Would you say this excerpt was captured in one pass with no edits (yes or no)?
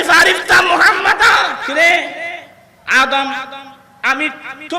no